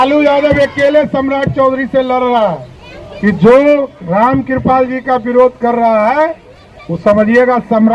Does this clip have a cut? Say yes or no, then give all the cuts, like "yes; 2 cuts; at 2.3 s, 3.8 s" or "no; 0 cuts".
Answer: yes; 1 cut; at 2.9 s